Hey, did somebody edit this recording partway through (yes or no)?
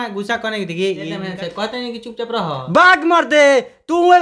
yes